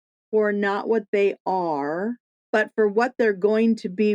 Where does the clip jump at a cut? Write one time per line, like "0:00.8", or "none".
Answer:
0:02.3

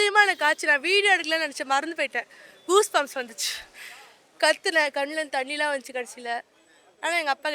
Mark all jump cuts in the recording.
none

